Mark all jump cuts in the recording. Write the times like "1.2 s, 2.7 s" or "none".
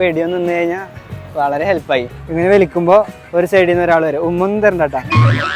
2.2 s